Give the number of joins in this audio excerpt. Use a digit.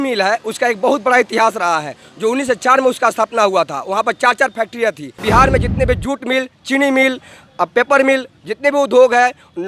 1